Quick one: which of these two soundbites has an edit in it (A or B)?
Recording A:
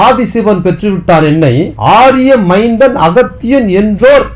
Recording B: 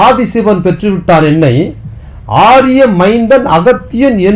A